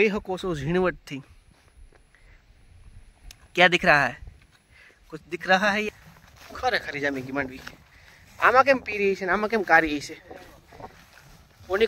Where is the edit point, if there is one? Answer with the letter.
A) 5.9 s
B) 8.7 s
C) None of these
A